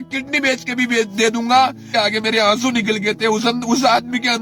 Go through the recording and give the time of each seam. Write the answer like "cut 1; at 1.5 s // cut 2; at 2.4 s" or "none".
cut 1; at 1.8 s